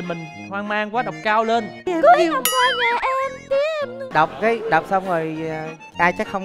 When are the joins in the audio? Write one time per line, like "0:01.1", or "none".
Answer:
0:01.9
0:04.1